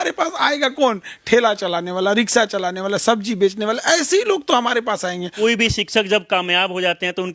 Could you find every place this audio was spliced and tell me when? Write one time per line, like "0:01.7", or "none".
0:05.3

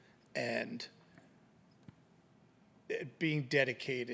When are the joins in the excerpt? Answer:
none

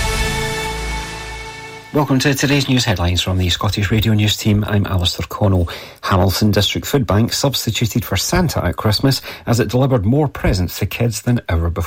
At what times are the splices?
0:01.8

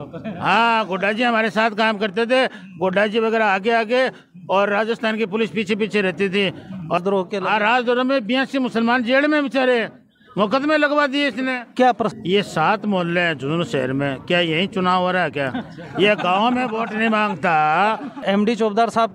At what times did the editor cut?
0:07.0
0:12.1
0:18.1

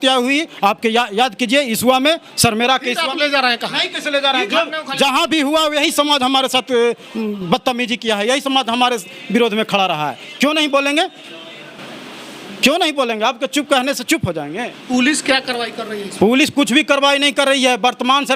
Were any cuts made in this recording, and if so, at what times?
none

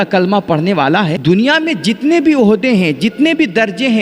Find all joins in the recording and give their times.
0:01.2

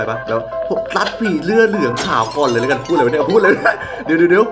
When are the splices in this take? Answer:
none

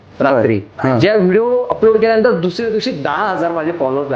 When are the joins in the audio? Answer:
none

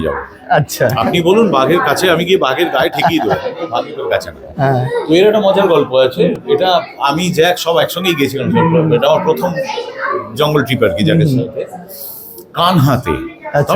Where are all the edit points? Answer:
none

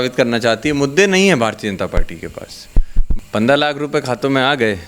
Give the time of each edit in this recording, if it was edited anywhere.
0:03.1

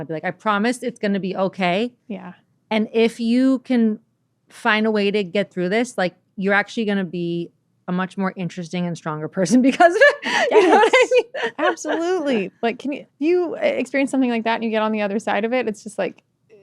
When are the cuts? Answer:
0:13.1

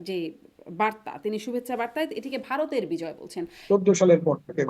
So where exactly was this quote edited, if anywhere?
0:03.5

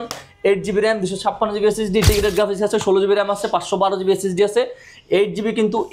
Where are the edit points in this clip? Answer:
0:02.1

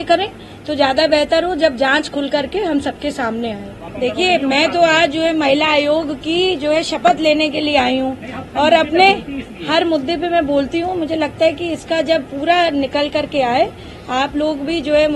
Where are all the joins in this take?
0:03.8

